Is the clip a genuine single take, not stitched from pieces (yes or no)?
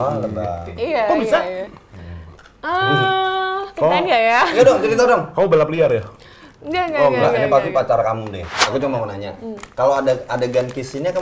no